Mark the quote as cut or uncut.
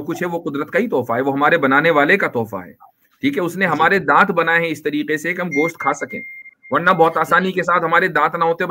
uncut